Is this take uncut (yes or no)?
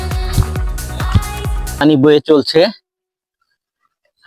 no